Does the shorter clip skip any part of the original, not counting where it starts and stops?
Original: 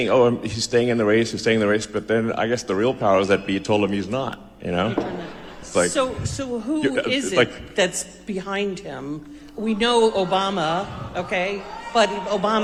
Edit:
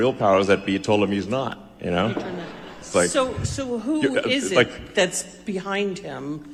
no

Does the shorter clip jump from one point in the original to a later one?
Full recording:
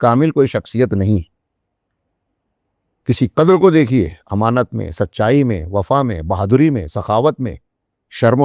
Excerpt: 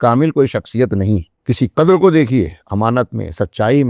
yes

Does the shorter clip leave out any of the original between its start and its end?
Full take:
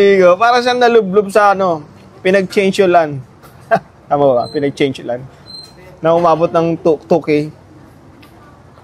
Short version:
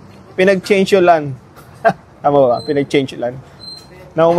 no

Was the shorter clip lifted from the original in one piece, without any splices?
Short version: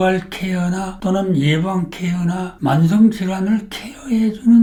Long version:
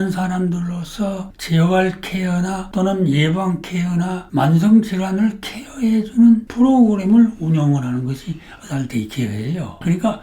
yes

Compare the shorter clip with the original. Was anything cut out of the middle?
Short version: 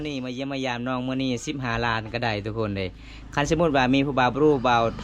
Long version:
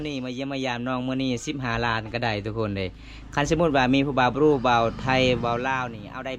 no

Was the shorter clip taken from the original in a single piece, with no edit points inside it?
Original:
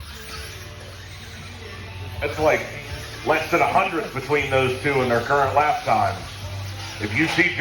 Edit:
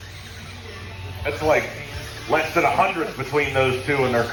yes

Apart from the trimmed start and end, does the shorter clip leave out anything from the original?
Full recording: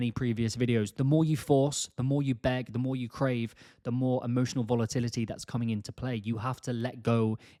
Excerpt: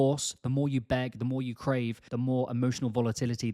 yes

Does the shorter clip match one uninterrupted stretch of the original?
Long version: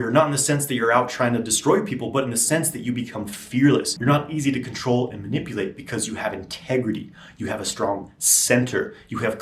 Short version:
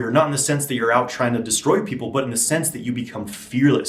yes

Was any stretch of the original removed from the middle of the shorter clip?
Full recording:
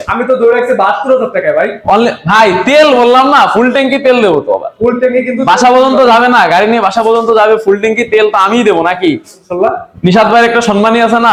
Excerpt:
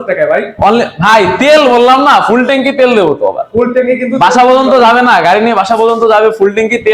no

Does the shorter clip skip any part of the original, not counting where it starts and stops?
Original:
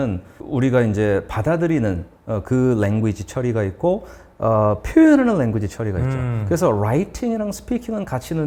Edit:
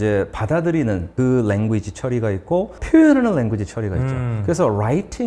yes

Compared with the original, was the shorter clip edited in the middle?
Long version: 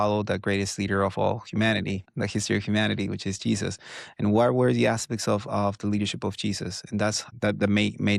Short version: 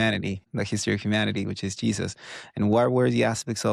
no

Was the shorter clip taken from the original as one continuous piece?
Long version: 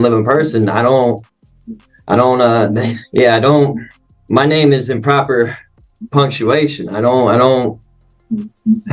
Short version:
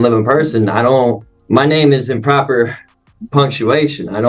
no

